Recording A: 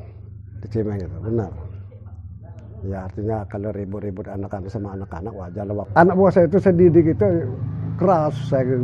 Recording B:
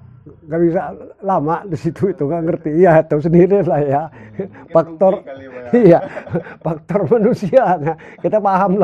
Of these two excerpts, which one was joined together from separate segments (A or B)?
A